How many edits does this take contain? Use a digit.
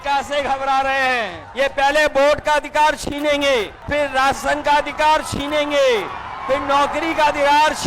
2